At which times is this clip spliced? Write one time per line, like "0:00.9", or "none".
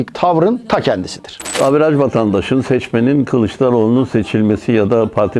0:01.6